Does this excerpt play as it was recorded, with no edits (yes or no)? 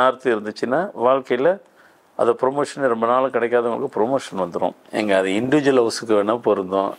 no